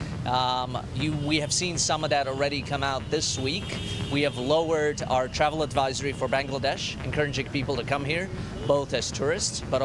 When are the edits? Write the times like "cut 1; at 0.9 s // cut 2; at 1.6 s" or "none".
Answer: none